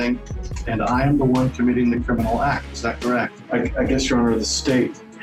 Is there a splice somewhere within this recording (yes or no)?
no